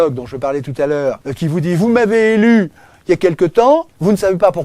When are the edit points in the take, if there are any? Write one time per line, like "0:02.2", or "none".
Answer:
0:01.3